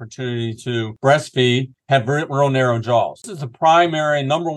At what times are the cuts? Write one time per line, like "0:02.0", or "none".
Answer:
0:00.9
0:01.7
0:03.4